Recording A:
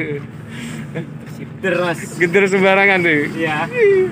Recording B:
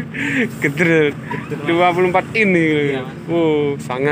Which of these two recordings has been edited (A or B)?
A